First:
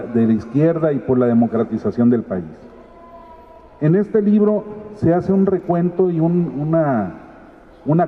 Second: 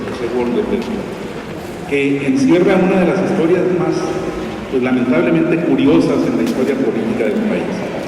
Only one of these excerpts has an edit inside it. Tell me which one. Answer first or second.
second